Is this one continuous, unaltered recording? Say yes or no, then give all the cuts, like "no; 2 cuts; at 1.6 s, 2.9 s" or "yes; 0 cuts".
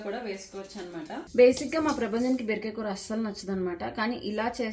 no; 1 cut; at 1.3 s